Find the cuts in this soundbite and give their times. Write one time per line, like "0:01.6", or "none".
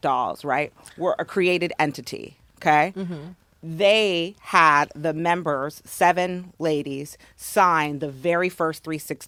none